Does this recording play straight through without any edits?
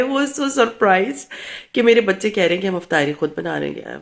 yes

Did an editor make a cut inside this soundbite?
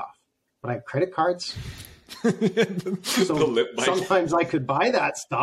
no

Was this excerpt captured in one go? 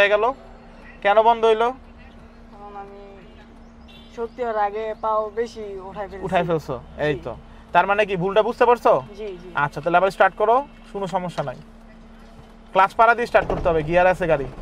yes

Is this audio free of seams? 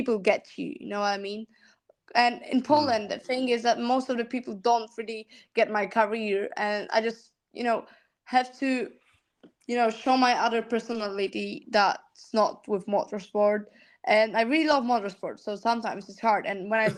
yes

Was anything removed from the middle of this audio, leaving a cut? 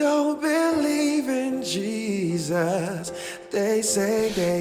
no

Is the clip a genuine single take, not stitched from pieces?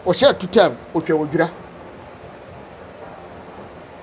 yes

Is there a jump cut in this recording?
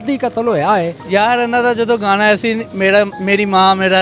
yes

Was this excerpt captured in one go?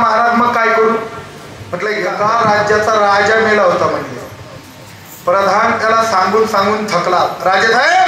no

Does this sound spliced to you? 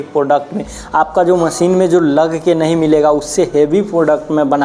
no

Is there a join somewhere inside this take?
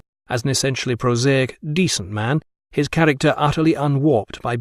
no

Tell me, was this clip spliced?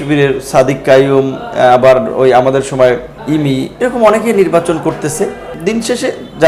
yes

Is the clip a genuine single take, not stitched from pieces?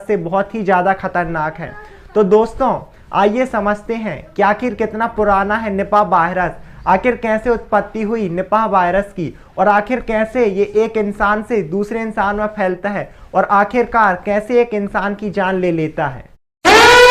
yes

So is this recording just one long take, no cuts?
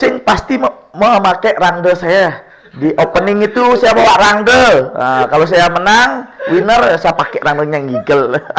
yes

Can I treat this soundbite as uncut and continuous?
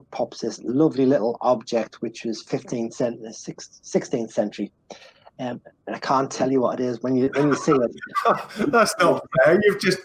yes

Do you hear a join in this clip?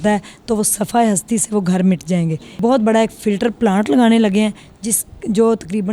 yes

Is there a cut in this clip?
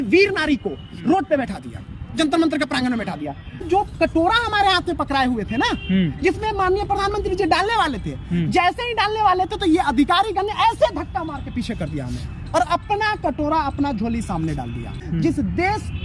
yes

